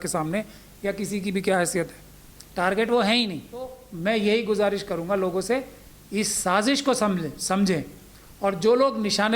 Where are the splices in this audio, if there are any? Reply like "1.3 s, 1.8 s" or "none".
3.9 s